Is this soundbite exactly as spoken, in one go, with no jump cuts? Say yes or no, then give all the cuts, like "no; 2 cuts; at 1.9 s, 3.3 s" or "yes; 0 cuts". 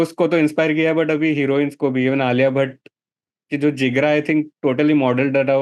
yes; 0 cuts